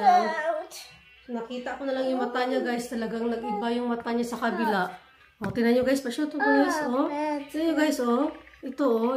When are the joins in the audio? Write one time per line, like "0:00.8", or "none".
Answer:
none